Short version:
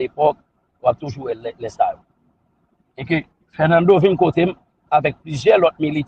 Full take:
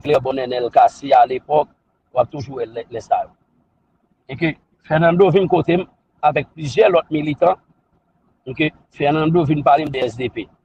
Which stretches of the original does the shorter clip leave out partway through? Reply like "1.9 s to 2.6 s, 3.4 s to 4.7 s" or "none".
none